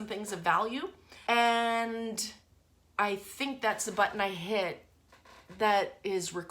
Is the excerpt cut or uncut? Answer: cut